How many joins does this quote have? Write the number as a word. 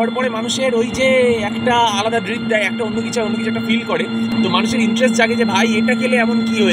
zero